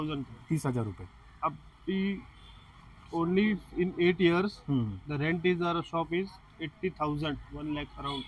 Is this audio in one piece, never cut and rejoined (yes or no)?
yes